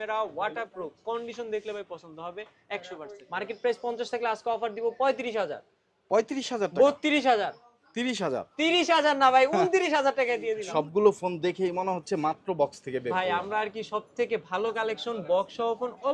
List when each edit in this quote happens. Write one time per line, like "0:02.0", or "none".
0:03.2
0:10.6